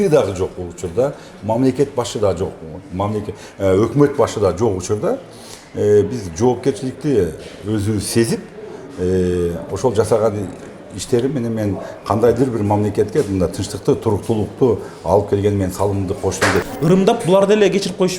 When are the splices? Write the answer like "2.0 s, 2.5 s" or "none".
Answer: 16.7 s